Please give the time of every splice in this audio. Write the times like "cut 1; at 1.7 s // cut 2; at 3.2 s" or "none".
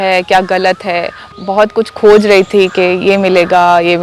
cut 1; at 1.2 s